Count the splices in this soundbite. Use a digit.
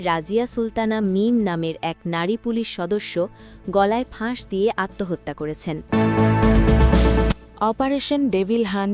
1